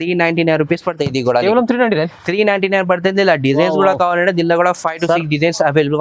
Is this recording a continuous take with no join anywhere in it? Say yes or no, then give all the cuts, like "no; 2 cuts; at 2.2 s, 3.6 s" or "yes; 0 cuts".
yes; 0 cuts